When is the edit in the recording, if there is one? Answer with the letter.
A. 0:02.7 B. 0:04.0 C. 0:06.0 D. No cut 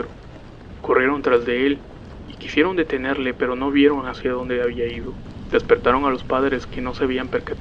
A